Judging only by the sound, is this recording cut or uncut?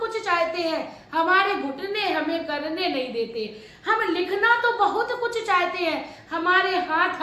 uncut